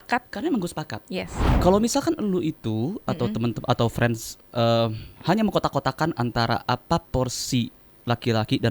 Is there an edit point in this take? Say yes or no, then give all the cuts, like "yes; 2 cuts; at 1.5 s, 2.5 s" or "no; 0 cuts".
yes; 1 cut; at 1.4 s